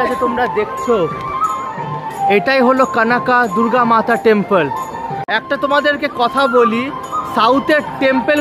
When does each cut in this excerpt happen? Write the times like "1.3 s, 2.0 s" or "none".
5.2 s